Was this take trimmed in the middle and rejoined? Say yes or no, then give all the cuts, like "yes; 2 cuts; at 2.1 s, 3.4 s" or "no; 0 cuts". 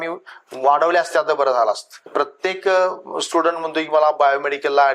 yes; 1 cut; at 2.1 s